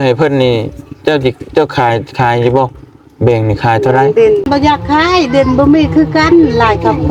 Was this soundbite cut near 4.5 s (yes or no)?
yes